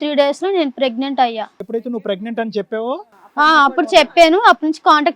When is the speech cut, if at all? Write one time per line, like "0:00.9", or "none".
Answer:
0:01.6